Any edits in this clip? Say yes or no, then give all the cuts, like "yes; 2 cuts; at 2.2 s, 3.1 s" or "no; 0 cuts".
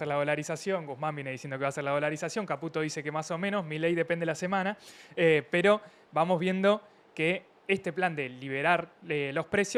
no; 0 cuts